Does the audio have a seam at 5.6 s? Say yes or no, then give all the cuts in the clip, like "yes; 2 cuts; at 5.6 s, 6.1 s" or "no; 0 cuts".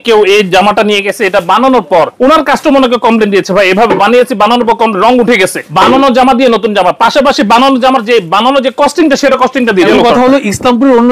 yes; 3 cuts; at 2.1 s, 5.6 s, 9.9 s